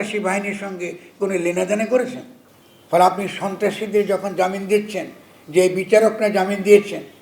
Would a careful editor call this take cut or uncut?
uncut